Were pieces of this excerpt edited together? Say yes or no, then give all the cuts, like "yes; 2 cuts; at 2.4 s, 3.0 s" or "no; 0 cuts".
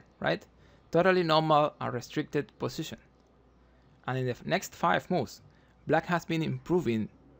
no; 0 cuts